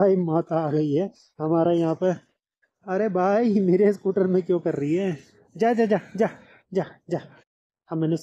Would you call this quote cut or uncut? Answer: uncut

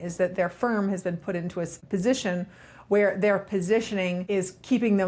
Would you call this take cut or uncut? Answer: cut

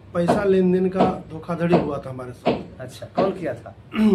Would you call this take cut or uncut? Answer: uncut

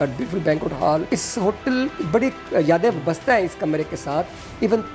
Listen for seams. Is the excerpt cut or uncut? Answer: cut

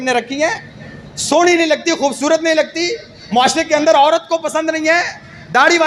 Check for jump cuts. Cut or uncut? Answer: uncut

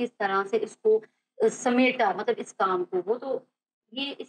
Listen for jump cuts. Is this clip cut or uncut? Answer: uncut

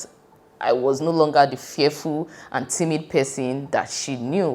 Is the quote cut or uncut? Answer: uncut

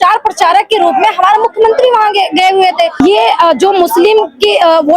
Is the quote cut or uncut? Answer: cut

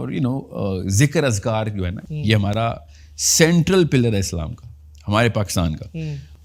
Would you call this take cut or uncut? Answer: uncut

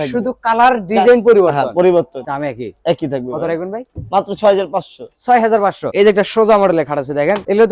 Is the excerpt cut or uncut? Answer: uncut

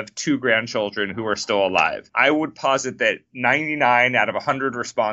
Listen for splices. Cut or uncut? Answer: cut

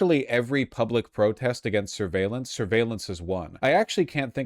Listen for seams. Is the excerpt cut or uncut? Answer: cut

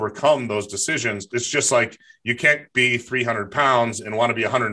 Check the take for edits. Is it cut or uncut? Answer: cut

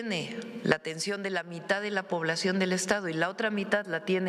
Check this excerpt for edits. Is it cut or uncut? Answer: uncut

